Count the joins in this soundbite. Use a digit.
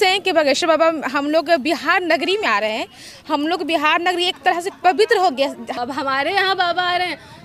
1